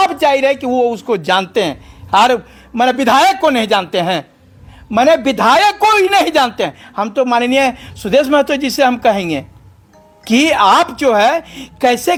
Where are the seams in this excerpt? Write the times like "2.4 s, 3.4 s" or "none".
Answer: none